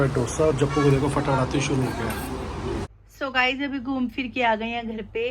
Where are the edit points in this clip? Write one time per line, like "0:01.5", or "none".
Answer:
0:02.9

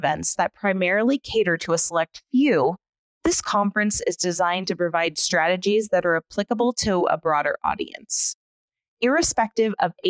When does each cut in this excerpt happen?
none

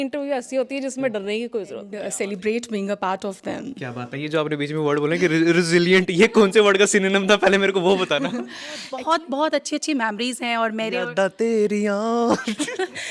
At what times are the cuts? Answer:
0:01.9
0:08.9

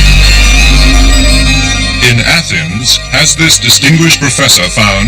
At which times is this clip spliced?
0:01.3

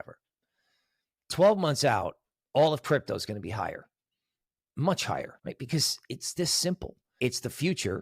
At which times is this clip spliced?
0:05.3
0:07.0

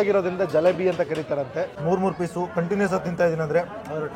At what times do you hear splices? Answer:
0:01.8

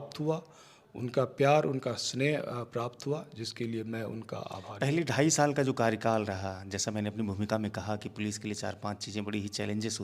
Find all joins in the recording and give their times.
0:04.6

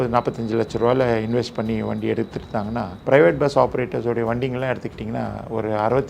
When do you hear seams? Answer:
0:02.9

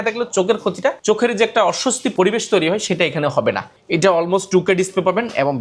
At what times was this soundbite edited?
0:01.0
0:02.1
0:03.7

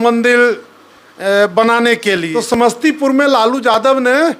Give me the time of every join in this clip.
0:02.3

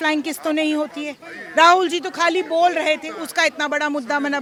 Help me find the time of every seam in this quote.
none

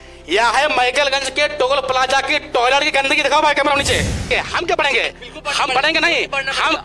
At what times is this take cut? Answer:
0:04.3

